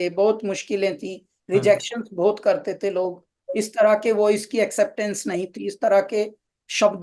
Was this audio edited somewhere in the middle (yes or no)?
no